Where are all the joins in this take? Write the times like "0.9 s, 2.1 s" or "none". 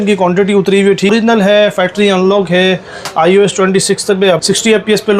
1.1 s, 4.4 s